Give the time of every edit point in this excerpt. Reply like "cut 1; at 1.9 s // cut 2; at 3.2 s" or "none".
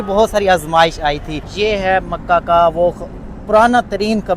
cut 1; at 1.5 s